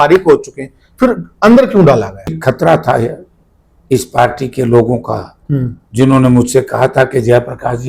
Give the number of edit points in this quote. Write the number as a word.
one